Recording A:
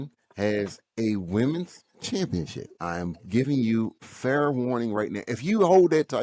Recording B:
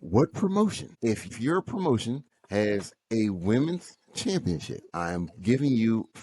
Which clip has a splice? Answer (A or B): B